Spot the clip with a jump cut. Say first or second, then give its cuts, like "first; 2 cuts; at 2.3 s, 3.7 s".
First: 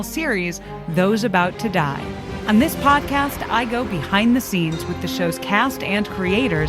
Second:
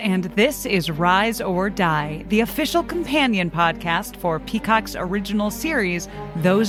first; 1 cut; at 2.3 s